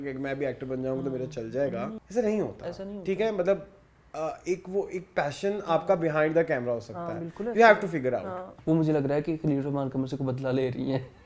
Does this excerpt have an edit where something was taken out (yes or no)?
yes